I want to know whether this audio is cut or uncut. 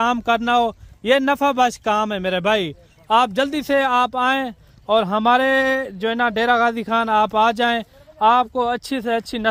uncut